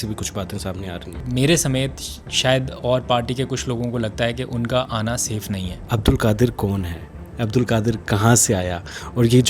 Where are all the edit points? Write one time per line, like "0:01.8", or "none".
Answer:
0:01.2
0:05.7